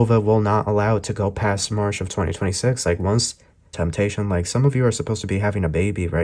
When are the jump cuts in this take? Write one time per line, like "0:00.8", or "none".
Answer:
0:03.7